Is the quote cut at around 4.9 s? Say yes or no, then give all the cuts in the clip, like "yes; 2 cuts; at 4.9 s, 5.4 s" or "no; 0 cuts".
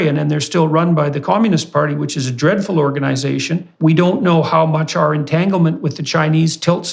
no; 1 cut; at 3.6 s